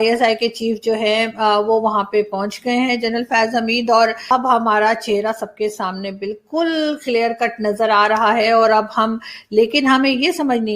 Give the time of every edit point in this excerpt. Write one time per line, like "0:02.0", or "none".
0:04.3